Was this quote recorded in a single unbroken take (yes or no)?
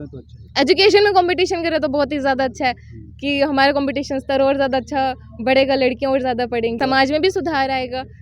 no